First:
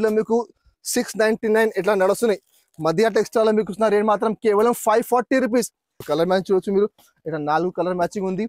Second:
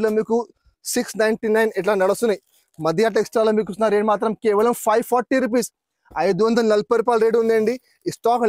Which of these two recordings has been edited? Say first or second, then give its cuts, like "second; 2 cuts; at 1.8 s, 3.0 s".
first; 1 cut; at 6.0 s